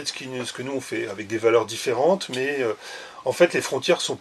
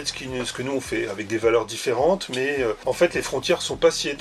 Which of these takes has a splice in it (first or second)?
second